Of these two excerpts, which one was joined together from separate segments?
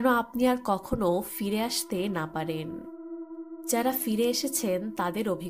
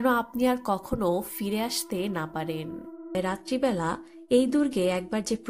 second; 1 cut; at 3.1 s

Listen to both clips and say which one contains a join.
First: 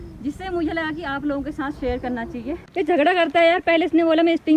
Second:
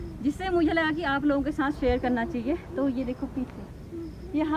first; 1 cut; at 2.7 s

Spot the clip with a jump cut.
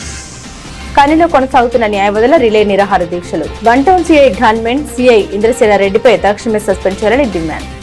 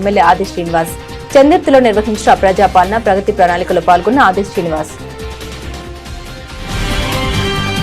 second; 1 cut; at 4.9 s

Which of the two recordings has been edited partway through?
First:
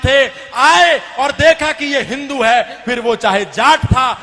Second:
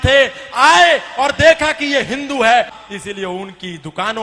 second; 1 cut; at 2.8 s

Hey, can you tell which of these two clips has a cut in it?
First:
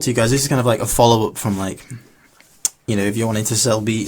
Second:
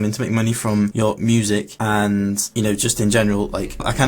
second; 3 cuts; at 0.9 s, 1.7 s, 2.5 s

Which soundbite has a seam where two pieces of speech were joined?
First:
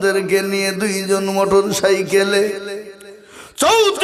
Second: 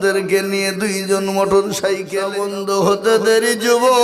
second; 1 cut; at 2.2 s

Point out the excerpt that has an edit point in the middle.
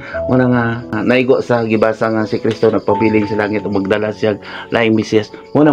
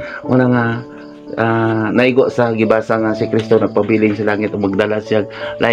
first; 1 cut; at 0.9 s

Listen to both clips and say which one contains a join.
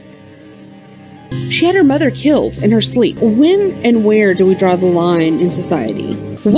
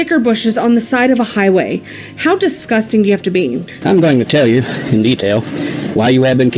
first; 1 cut; at 0.9 s

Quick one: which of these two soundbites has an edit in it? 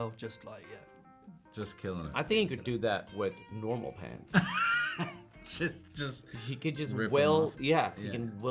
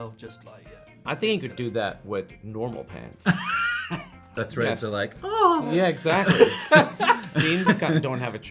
second; 2 cuts; at 1.0 s, 4.3 s

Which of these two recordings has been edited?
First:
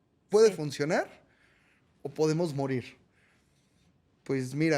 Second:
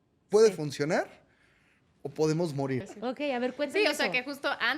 second; 1 cut; at 2.9 s

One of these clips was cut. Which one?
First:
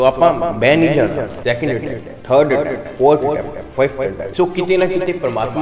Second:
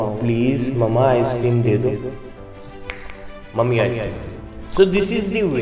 first; 2 cuts; at 1.3 s, 4.2 s

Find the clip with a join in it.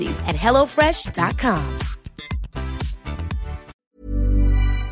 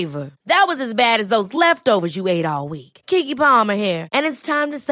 first; 1 cut; at 3.8 s

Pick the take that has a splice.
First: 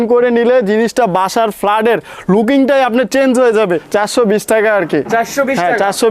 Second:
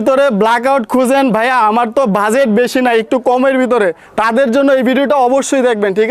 first; 1 cut; at 3.8 s

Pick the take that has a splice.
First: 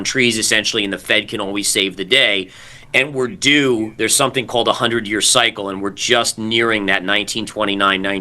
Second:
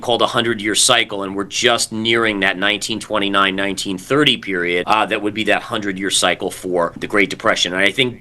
second; 2 cuts; at 4.8 s, 7.0 s

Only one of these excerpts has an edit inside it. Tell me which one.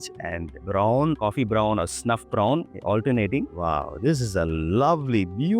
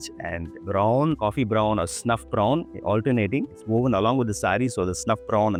first; 1 cut; at 3.5 s

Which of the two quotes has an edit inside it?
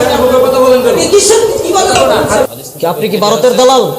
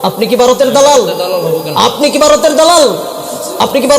first; 1 cut; at 2.5 s

